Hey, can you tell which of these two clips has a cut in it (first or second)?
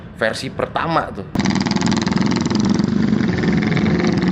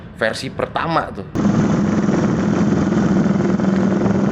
first